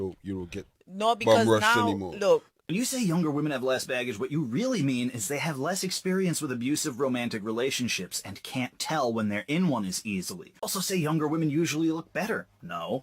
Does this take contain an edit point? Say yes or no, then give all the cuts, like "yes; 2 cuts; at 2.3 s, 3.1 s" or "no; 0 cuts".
yes; 2 cuts; at 2.6 s, 10.7 s